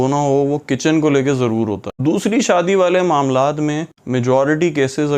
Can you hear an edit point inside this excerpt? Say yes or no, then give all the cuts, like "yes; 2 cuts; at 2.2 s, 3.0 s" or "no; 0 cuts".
yes; 1 cut; at 1.9 s